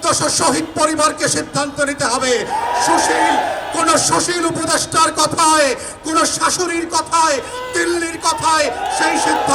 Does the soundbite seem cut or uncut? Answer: uncut